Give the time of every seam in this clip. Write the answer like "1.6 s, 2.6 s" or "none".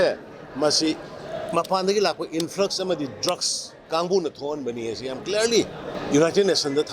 3.8 s, 5.9 s